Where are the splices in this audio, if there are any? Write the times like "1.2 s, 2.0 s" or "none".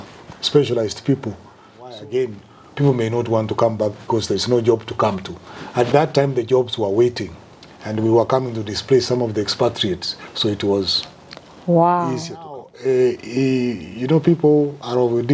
1.9 s, 12.7 s